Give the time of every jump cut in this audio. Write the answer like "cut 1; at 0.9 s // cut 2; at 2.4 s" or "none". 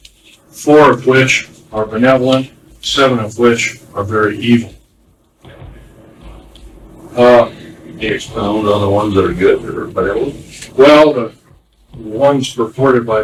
none